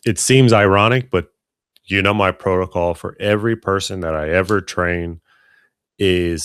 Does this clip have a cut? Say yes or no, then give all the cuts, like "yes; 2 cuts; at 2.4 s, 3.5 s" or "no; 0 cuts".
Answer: no; 0 cuts